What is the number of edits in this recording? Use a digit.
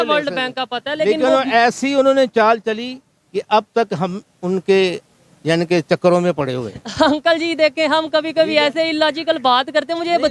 0